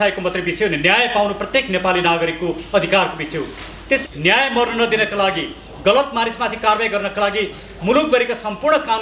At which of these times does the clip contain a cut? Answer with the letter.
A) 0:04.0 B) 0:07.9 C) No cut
A